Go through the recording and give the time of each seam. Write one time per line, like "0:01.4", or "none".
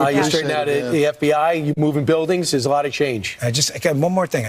0:01.0